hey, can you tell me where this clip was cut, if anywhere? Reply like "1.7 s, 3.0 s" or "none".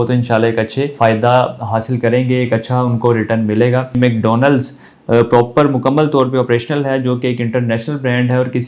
0.9 s, 3.9 s